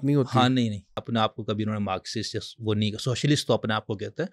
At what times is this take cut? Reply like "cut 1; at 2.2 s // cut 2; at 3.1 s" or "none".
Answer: cut 1; at 1.0 s